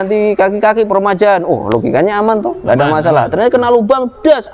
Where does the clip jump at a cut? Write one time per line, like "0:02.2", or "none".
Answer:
none